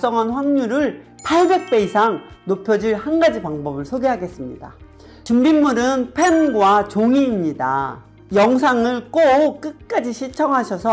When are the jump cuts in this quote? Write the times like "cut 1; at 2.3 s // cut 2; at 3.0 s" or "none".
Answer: none

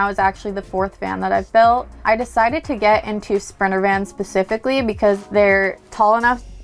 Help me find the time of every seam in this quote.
none

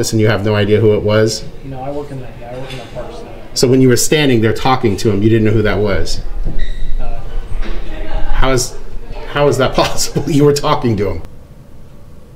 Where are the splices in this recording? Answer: cut 1; at 11.4 s

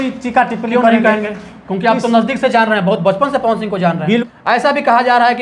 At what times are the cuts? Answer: cut 1; at 4.3 s

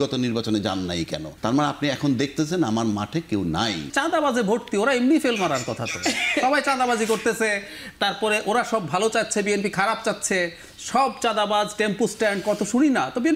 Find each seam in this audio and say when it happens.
cut 1; at 1.3 s // cut 2; at 3.9 s

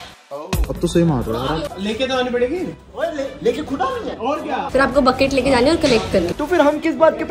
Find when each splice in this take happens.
cut 1; at 1.7 s // cut 2; at 4.7 s // cut 3; at 6.3 s

